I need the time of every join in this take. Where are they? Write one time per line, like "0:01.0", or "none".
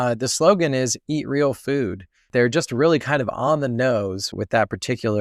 0:02.3
0:04.4